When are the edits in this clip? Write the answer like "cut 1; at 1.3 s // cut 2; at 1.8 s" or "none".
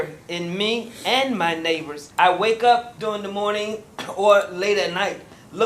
cut 1; at 2.0 s // cut 2; at 2.9 s